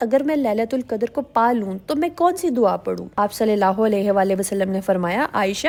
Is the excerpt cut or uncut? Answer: uncut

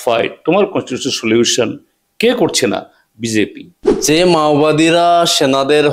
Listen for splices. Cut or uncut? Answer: cut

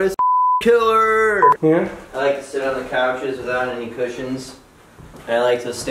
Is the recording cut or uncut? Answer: cut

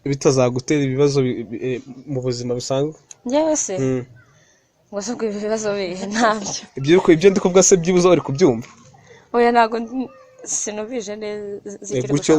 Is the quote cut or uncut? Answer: uncut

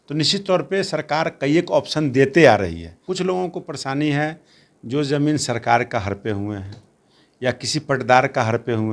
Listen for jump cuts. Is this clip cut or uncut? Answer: cut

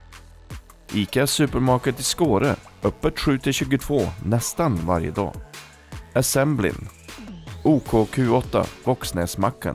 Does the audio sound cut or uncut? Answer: cut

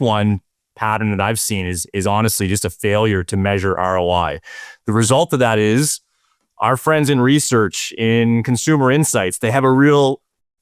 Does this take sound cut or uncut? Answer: uncut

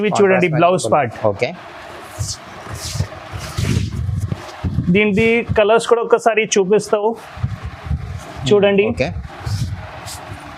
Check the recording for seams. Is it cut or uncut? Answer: uncut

